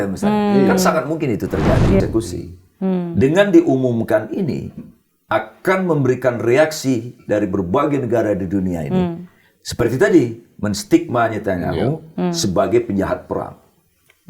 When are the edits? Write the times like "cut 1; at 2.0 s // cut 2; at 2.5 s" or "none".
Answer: cut 1; at 2.0 s